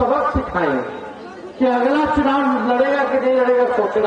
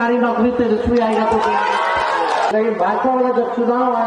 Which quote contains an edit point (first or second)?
second